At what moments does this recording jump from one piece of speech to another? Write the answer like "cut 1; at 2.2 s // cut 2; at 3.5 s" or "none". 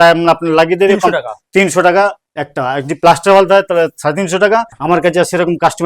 cut 1; at 4.7 s

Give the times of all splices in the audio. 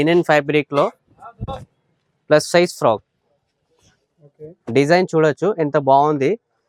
none

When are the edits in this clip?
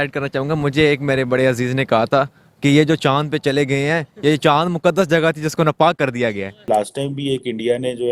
cut 1; at 6.7 s

